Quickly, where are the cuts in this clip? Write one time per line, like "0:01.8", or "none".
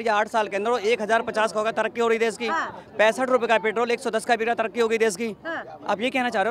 none